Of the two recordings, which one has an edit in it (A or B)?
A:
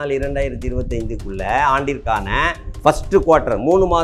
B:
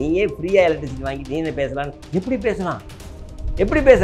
A